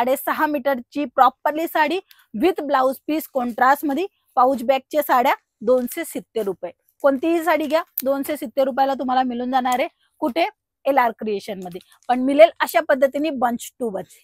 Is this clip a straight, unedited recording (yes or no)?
yes